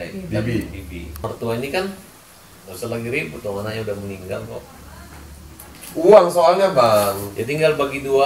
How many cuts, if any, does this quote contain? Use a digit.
1